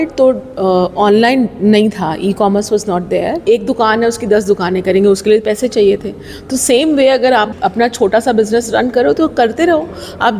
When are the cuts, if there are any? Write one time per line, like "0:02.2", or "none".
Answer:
0:03.4
0:07.5